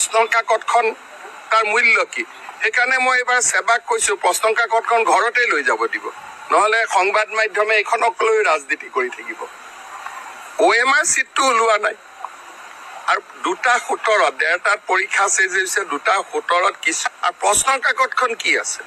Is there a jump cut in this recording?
yes; 1 cut; at 16.9 s

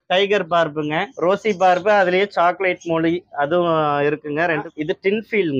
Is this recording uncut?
no; 2 cuts; at 1.1 s, 4.7 s

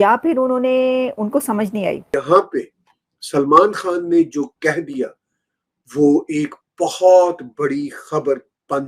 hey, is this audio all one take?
no; 1 cut; at 2.0 s

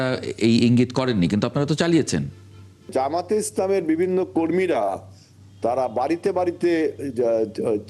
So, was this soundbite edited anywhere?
yes; 1 cut; at 2.9 s

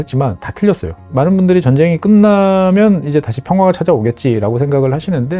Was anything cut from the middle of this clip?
yes; 1 cut; at 1.1 s

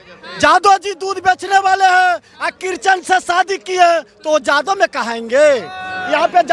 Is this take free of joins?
yes; 0 cuts

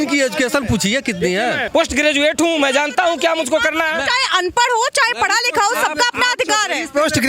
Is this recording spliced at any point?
yes; 1 cut; at 1.6 s

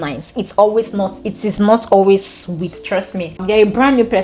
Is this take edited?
yes; 1 cut; at 3.3 s

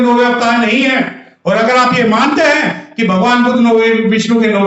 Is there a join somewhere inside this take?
no; 0 cuts

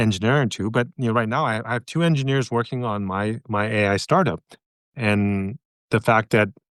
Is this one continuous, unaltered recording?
no; 1 cut; at 4.9 s

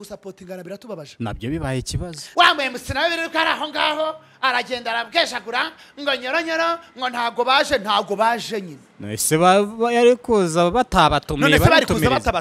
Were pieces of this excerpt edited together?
yes; 1 cut; at 2.2 s

